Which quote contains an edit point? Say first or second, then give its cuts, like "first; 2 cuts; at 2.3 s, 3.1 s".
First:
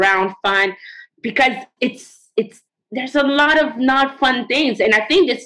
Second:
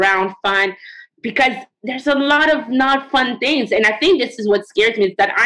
second; 1 cut; at 1.7 s